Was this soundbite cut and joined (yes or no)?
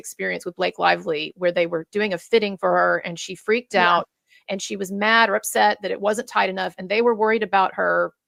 no